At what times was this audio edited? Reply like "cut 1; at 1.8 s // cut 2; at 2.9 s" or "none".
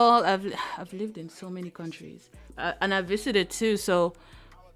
cut 1; at 2.4 s